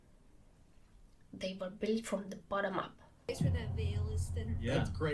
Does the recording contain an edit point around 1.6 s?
no; 1 cut; at 3.3 s

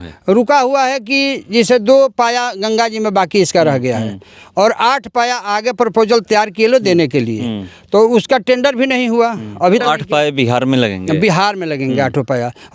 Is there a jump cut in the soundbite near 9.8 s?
yes; 1 cut; at 9.8 s

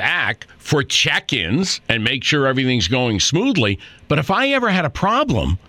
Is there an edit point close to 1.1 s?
no; 0 cuts

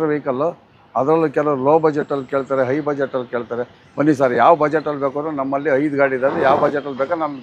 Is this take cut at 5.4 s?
no; 0 cuts

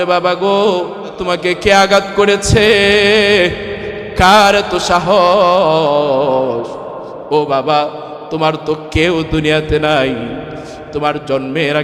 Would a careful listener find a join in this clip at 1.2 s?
yes; 1 cut; at 1.2 s

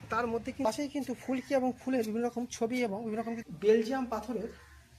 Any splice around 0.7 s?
yes; 2 cuts; at 0.7 s, 3.5 s

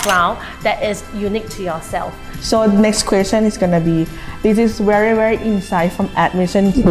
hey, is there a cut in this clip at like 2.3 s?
yes; 1 cut; at 2.3 s

